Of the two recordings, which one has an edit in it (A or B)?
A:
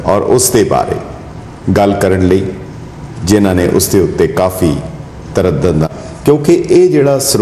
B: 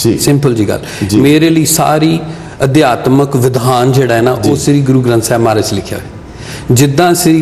A